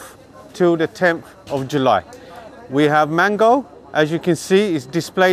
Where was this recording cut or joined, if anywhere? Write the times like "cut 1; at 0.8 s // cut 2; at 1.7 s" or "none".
none